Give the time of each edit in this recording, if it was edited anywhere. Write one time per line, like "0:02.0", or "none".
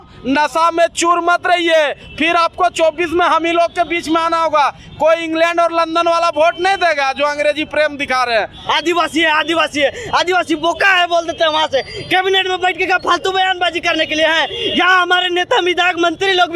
0:08.6